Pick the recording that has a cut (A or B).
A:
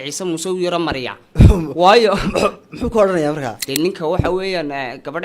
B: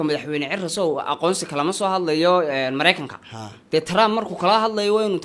A